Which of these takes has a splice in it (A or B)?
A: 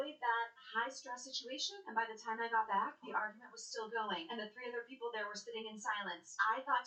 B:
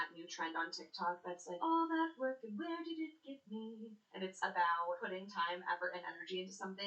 B